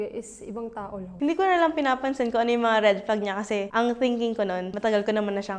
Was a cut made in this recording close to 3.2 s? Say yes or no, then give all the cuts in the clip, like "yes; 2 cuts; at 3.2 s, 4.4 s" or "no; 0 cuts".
no; 2 cuts; at 1.1 s, 4.7 s